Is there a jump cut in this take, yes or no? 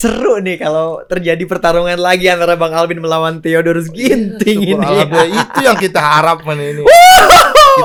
no